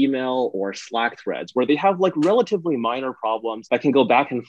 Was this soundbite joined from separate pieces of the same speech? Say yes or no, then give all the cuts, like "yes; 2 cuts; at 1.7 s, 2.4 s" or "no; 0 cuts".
yes; 1 cut; at 3.6 s